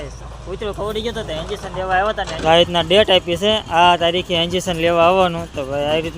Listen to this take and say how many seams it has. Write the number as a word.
one